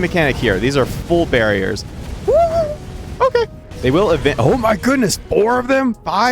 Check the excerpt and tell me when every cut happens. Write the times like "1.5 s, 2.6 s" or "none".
1.0 s, 3.1 s